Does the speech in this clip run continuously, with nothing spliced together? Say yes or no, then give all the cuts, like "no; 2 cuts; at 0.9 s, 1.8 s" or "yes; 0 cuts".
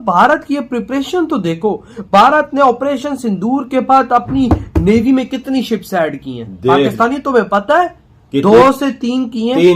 yes; 0 cuts